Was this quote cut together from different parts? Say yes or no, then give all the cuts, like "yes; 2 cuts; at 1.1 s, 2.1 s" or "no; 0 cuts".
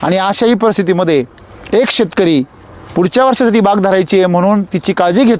no; 0 cuts